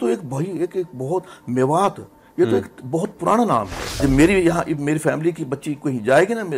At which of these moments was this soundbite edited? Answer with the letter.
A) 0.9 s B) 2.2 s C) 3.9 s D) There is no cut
C